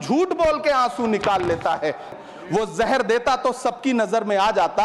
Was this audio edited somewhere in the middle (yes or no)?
yes